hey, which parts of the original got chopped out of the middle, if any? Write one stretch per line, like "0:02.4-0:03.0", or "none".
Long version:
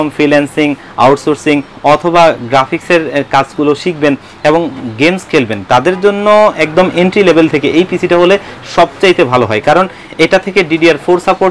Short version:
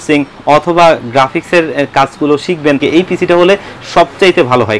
0:04.2-0:07.6